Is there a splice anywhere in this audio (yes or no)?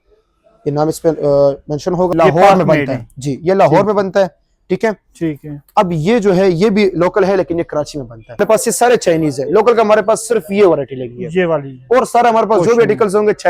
yes